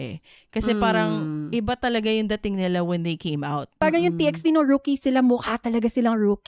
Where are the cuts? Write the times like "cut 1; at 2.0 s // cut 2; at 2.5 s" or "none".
cut 1; at 3.8 s